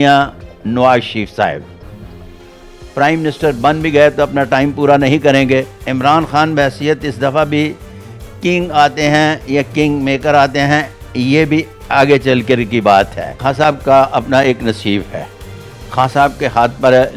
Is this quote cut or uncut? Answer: cut